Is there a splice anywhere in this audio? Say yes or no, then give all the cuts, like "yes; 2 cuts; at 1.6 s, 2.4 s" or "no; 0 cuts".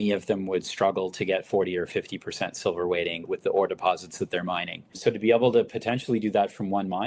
yes; 1 cut; at 4.9 s